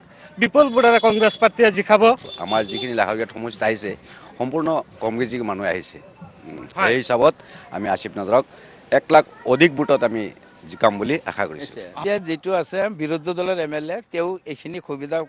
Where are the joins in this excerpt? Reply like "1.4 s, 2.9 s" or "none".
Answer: 2.3 s, 12.0 s